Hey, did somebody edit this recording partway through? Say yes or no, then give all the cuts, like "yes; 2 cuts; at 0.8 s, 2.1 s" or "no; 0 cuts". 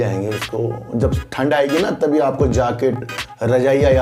no; 0 cuts